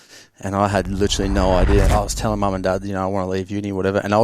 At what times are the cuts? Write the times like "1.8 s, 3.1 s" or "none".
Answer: 1.9 s